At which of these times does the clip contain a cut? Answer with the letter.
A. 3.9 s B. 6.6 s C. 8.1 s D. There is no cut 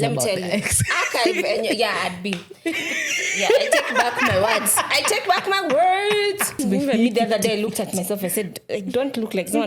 B